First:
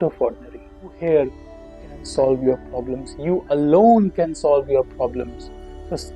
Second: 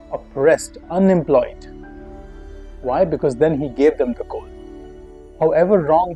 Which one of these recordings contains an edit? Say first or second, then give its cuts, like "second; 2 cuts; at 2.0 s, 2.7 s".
first; 1 cut; at 0.9 s